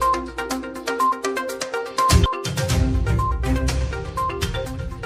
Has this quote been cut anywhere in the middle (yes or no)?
no